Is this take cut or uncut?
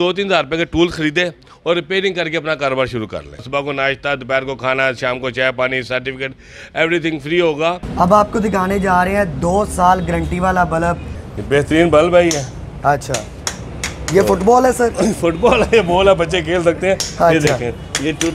cut